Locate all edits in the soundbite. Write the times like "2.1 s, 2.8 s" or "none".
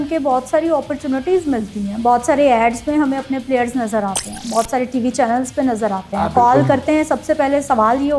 none